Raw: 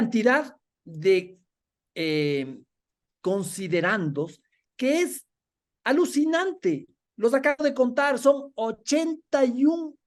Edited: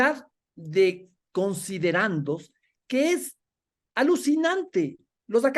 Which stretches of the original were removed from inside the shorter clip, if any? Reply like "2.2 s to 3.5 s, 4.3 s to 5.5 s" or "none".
1.4 s to 3.0 s